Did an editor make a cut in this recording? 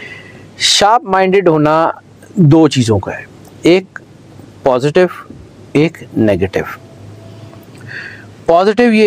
no; 0 cuts

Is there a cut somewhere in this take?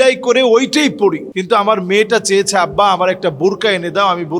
yes; 1 cut; at 1.3 s

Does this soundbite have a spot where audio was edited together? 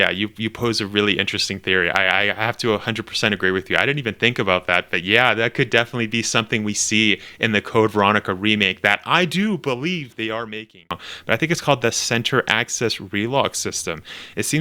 yes; 1 cut; at 11.1 s

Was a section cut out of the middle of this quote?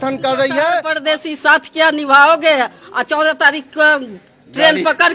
yes; 1 cut; at 0.9 s

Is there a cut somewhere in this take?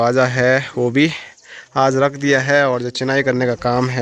no; 0 cuts

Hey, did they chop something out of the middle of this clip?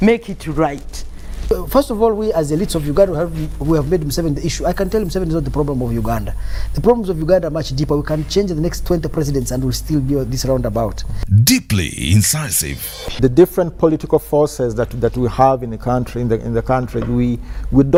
no; 0 cuts

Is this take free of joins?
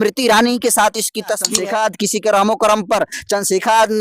no; 1 cut; at 1.5 s

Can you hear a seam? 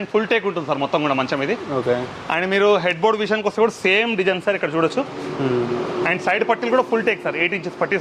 no; 0 cuts

